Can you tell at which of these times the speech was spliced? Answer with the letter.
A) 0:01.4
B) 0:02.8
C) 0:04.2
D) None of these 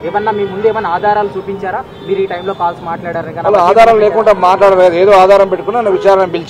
D